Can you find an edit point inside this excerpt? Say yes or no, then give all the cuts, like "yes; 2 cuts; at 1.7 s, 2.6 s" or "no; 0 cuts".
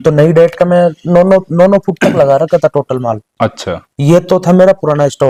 no; 0 cuts